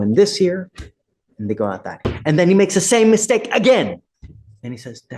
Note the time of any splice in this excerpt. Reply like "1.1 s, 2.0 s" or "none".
2.0 s